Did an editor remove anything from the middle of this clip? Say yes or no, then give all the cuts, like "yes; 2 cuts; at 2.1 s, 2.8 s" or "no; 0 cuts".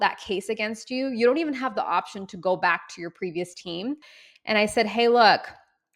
yes; 1 cut; at 4.1 s